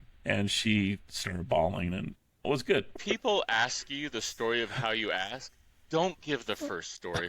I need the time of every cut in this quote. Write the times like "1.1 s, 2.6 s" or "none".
2.9 s